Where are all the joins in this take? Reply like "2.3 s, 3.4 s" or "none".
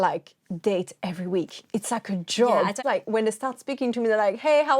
2.8 s